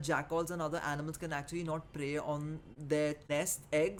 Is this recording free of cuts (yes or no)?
yes